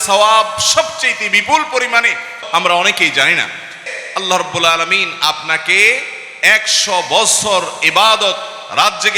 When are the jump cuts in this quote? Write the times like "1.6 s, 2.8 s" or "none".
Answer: 2.4 s, 3.8 s